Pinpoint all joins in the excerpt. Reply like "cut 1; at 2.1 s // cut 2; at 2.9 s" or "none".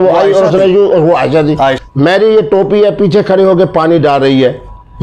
cut 1; at 1.8 s